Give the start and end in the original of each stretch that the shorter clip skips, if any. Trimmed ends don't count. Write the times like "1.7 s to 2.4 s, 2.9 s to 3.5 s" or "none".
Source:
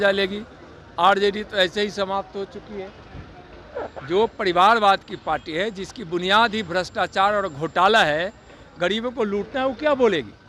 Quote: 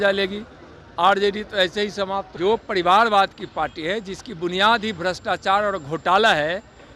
2.3 s to 4.0 s